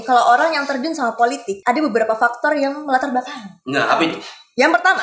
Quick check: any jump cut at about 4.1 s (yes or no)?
no